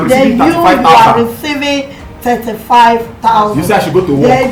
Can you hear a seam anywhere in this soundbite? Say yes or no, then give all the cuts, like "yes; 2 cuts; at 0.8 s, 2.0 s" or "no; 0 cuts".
no; 0 cuts